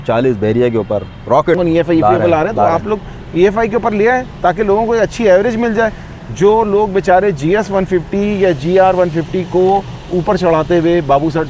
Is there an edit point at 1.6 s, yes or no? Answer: yes